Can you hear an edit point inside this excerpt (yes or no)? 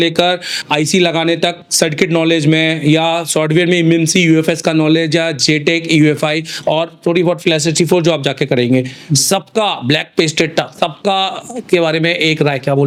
no